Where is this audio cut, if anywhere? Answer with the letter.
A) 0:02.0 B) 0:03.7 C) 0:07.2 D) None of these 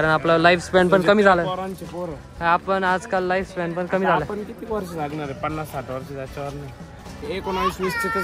C